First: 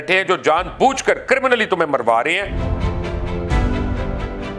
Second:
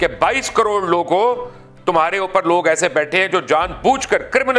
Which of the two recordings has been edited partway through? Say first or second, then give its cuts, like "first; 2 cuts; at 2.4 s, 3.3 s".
first; 1 cut; at 2.6 s